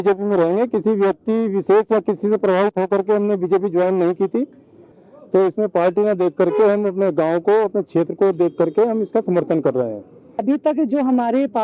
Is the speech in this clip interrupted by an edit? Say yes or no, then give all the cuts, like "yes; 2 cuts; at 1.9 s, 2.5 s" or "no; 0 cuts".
yes; 2 cuts; at 4.9 s, 10.3 s